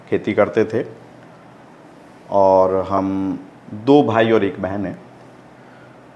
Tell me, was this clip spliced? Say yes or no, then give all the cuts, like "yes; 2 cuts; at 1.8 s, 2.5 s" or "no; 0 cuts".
no; 0 cuts